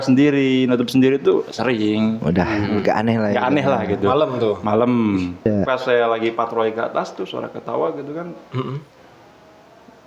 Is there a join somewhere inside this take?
yes; 1 cut; at 5.4 s

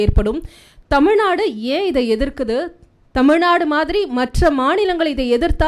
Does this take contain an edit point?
no; 0 cuts

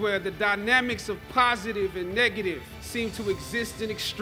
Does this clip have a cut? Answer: no; 0 cuts

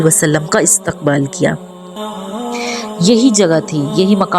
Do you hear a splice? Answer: yes; 1 cut; at 2.1 s

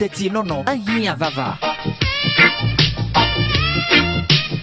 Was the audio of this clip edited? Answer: yes; 1 cut; at 3.7 s

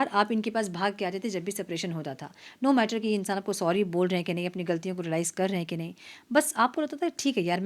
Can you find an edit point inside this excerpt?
no; 0 cuts

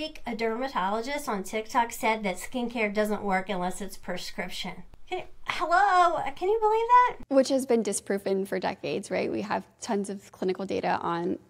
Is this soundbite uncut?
no; 2 cuts; at 4.9 s, 7.2 s

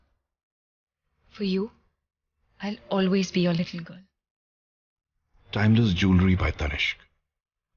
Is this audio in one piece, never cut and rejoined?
no; 1 cut; at 1.6 s

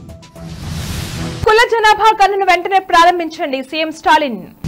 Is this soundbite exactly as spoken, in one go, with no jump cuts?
no; 1 cut; at 1.4 s

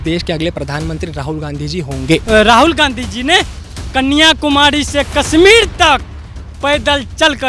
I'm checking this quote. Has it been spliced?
yes; 1 cut; at 2.2 s

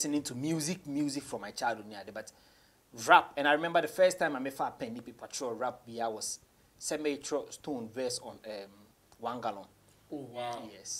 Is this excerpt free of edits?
yes; 0 cuts

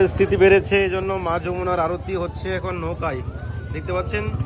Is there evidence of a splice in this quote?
no; 0 cuts

